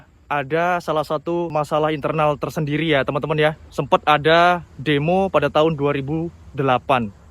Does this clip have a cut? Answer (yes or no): yes